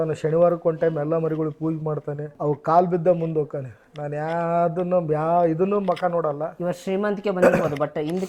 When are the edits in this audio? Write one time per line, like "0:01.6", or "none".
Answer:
none